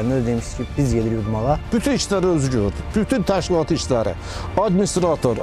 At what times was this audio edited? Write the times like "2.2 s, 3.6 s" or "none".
1.7 s